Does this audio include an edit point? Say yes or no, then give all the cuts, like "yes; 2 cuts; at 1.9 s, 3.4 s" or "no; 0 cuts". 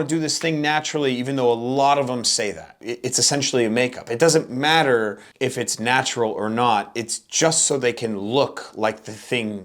yes; 2 cuts; at 2.9 s, 5.2 s